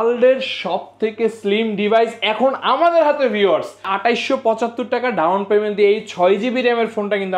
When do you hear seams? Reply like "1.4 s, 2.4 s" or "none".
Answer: 3.8 s